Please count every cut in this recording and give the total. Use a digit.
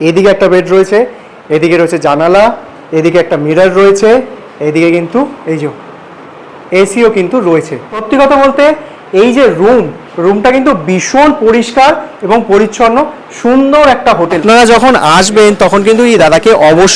2